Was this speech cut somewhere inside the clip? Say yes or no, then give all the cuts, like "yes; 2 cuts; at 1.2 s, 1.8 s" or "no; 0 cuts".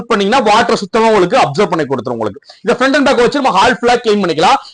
no; 0 cuts